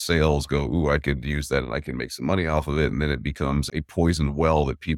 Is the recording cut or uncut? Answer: cut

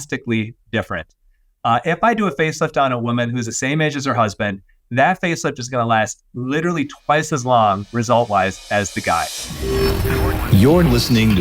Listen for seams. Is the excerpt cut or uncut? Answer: cut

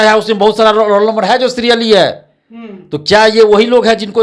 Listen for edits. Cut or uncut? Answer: uncut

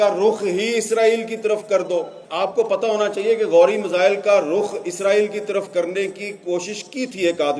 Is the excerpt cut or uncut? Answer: cut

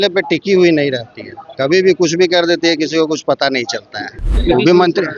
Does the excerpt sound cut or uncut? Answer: cut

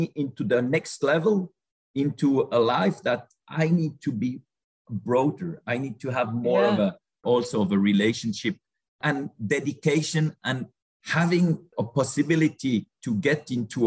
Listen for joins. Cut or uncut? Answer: cut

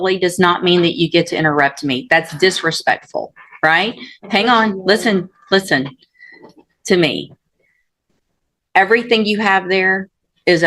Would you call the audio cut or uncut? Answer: uncut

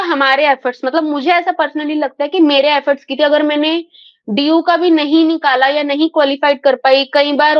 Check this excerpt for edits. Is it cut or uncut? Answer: uncut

